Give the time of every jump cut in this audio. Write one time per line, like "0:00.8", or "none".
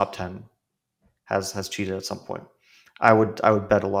none